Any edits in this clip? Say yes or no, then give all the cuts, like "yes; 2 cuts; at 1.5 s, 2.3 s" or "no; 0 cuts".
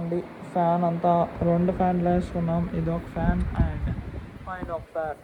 no; 0 cuts